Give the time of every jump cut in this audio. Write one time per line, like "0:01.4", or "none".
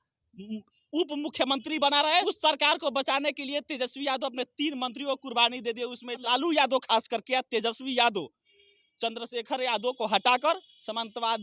0:02.2
0:06.2

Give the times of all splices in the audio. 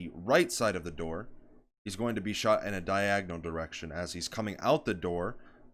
none

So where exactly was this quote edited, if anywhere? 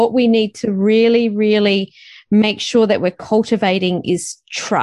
none

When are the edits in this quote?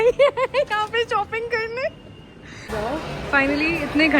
0:02.7

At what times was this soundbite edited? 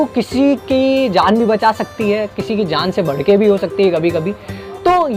none

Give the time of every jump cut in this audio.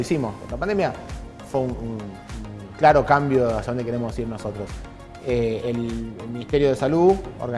none

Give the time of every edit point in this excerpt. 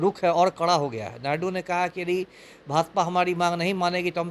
none

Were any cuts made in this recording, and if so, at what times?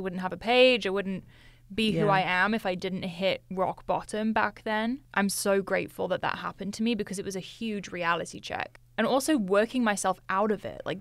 none

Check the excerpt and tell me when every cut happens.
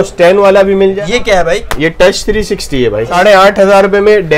0:01.0
0:03.1

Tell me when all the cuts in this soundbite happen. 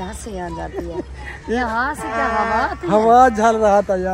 none

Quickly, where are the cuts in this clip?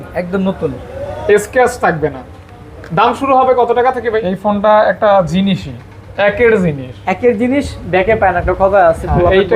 0:04.1

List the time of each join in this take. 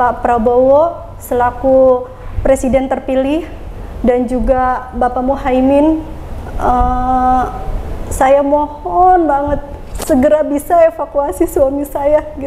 none

